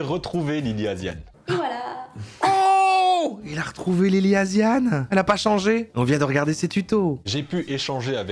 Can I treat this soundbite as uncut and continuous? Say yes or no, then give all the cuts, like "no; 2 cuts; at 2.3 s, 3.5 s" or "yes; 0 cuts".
no; 3 cuts; at 5.0 s, 5.9 s, 7.2 s